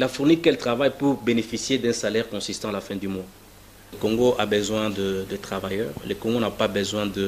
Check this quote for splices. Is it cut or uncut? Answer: cut